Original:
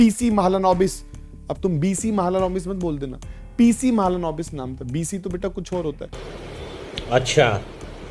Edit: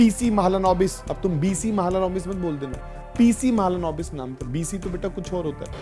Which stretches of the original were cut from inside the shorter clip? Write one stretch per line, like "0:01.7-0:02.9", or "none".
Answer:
0:01.1-0:01.4